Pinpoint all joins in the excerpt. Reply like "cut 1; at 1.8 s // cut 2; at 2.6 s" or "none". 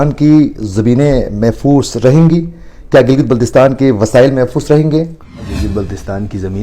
cut 1; at 5.6 s